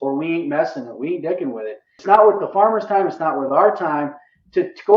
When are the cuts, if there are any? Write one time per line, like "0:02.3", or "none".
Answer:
0:02.0